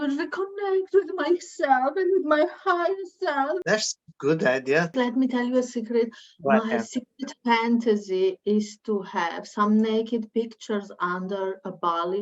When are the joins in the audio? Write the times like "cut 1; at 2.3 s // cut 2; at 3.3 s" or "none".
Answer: cut 1; at 3.6 s // cut 2; at 4.9 s